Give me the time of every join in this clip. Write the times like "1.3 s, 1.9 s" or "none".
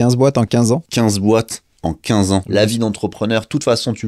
0.9 s, 2.4 s